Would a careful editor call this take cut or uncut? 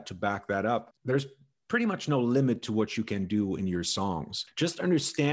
cut